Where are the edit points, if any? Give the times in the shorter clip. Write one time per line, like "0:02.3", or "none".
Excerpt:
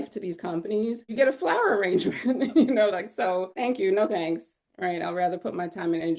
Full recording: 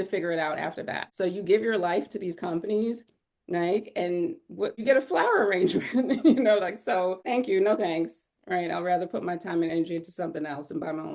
0:01.1